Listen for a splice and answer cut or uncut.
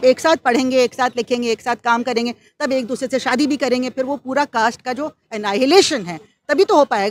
uncut